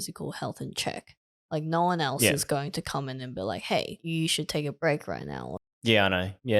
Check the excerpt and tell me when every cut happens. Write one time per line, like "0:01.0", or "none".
0:04.0